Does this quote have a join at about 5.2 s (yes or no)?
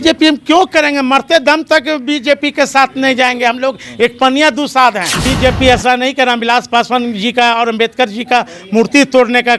yes